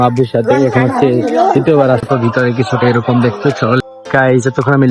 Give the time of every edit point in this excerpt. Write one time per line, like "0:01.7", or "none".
0:02.1
0:03.8